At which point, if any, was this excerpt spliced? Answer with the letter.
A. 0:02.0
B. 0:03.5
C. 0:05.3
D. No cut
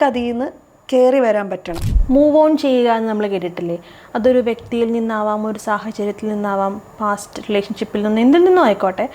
A